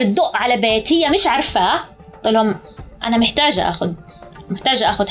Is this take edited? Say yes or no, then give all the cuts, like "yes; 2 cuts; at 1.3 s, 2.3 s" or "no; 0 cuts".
no; 0 cuts